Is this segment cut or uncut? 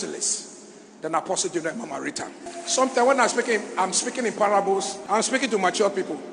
cut